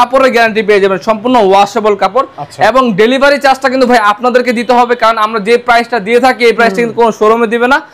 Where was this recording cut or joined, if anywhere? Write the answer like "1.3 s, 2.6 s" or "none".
none